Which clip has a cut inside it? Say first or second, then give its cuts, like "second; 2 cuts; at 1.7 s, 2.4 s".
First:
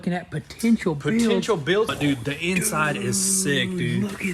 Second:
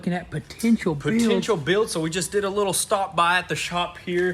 first; 1 cut; at 1.9 s